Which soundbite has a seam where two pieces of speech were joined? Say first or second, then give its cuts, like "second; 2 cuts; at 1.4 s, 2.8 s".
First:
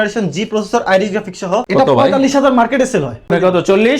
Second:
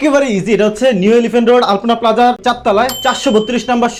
first; 2 cuts; at 1.6 s, 3.3 s